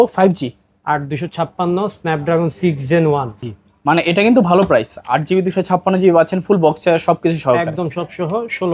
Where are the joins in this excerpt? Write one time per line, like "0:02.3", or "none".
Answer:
0:03.4